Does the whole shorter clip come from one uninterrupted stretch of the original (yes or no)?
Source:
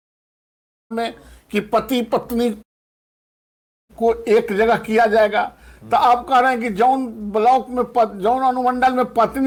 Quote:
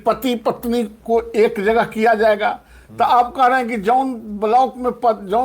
no